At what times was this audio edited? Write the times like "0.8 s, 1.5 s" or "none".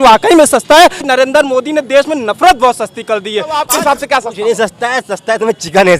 1.1 s, 3.7 s